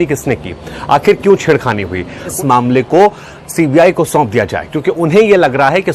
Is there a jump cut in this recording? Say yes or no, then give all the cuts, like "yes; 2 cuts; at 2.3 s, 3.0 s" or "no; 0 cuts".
yes; 1 cut; at 2.3 s